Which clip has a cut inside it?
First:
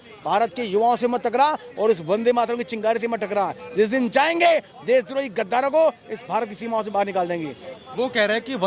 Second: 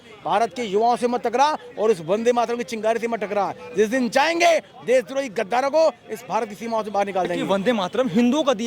second; 1 cut; at 7.4 s

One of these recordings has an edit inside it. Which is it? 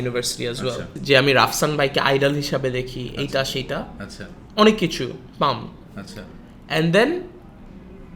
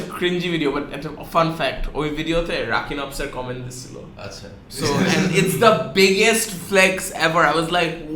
first; 1 cut; at 0.9 s

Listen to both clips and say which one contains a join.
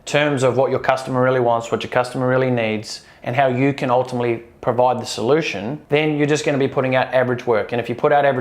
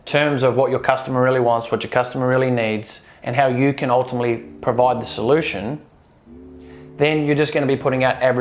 first; 1 cut; at 5.8 s

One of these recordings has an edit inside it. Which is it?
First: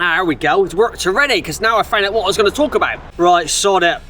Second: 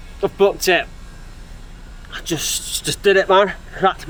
first; 1 cut; at 3.0 s

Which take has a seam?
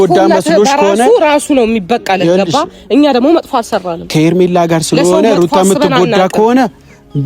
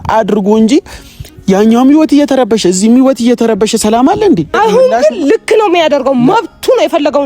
second; 1 cut; at 4.5 s

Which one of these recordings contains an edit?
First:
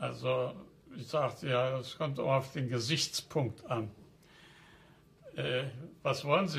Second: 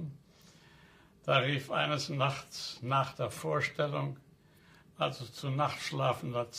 first; 1 cut; at 3.9 s

